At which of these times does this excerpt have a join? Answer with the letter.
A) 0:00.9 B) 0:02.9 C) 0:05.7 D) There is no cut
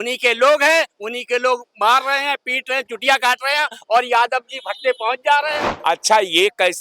C